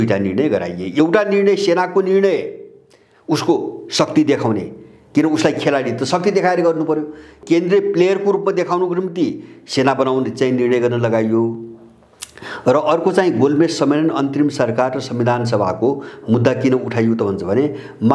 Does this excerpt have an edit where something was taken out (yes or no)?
yes